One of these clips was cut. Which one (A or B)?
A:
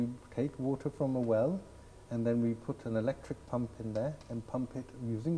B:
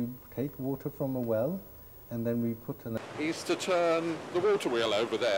B